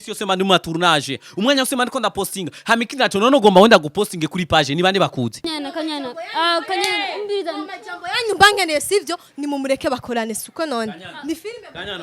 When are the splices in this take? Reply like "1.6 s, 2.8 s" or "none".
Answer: 5.6 s